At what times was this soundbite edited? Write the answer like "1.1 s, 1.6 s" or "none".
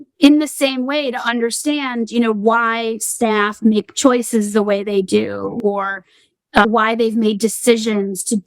6.7 s